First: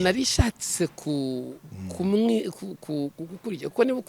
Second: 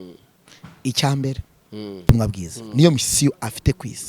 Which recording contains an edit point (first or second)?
second